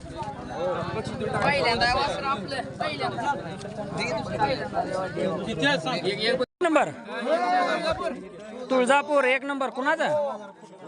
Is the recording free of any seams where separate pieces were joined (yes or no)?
no